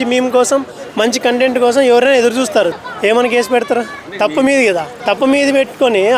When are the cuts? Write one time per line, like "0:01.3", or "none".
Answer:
0:02.7
0:04.0
0:04.9